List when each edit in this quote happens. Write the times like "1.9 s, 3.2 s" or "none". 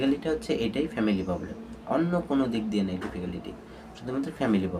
none